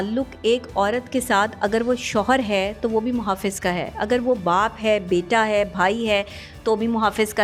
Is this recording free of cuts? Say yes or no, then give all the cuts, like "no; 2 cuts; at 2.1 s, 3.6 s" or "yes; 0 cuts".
yes; 0 cuts